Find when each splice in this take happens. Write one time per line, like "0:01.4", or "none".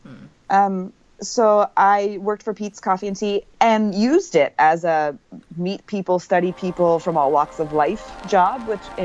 none